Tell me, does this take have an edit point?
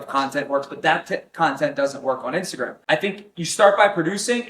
yes; 1 cut; at 2.8 s

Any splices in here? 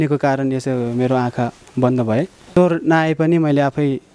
yes; 1 cut; at 2.6 s

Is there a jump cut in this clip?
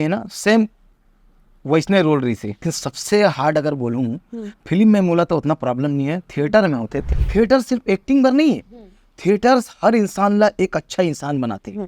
yes; 2 cuts; at 2.8 s, 7.0 s

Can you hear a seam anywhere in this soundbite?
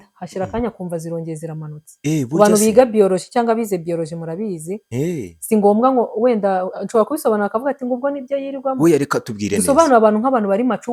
no; 0 cuts

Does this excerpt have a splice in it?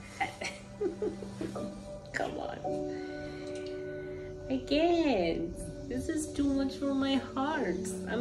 no; 0 cuts

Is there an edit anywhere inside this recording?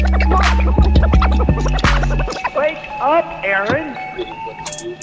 no; 0 cuts

